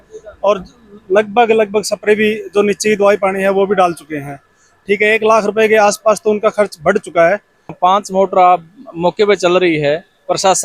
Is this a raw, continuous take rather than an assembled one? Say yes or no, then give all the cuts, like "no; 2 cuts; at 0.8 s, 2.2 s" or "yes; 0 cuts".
no; 1 cut; at 7.8 s